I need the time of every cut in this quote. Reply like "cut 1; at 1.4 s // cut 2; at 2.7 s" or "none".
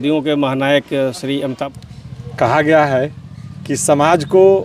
cut 1; at 1.6 s